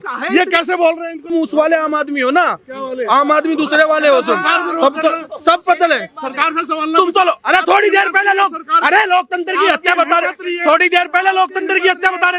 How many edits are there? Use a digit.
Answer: 1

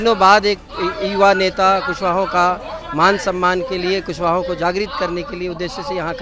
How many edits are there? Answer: 0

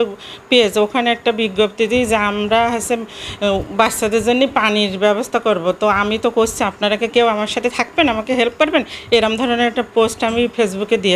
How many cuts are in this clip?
0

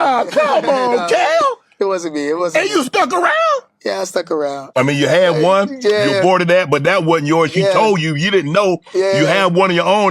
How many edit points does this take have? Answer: 1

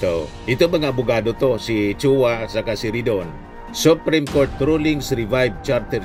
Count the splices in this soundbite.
0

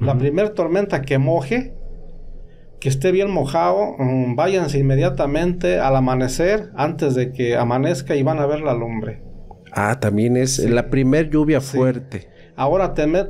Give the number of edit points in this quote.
0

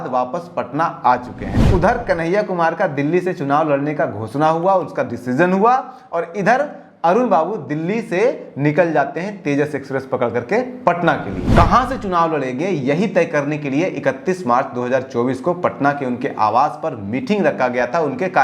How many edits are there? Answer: 2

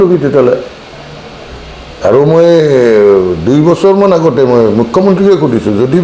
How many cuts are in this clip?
0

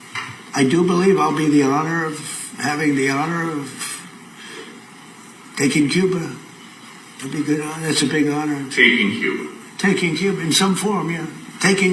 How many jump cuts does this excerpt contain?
1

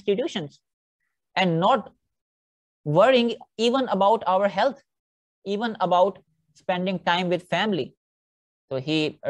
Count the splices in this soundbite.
1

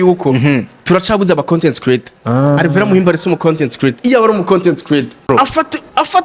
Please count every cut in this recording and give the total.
1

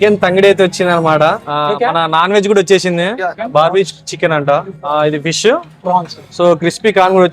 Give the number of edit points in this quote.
4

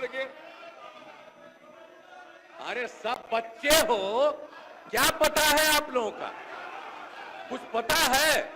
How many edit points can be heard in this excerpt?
0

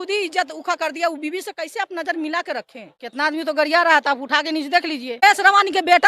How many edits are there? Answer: 2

